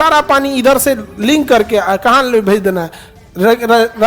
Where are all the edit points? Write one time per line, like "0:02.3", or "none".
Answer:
none